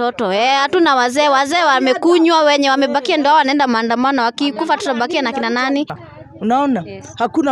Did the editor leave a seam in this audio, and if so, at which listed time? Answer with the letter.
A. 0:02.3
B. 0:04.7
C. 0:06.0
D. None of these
C